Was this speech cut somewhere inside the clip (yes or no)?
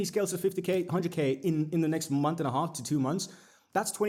no